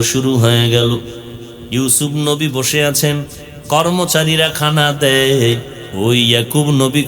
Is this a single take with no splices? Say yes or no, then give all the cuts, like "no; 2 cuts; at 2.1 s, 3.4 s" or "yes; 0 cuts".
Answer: no; 1 cut; at 5.8 s